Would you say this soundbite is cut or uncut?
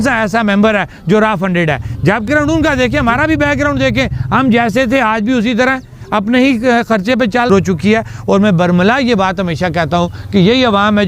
cut